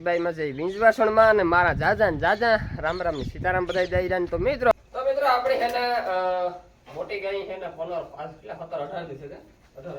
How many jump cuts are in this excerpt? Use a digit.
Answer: 1